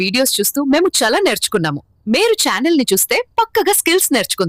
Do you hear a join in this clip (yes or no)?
no